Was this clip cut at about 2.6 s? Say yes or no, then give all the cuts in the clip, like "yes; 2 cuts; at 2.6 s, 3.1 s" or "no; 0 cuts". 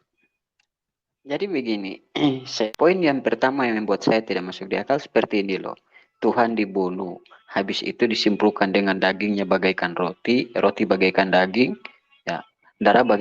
yes; 1 cut; at 2.6 s